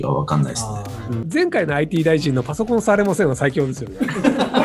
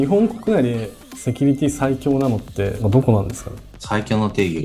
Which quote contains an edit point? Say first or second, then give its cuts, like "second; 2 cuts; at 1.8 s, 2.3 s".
first; 1 cut; at 1.2 s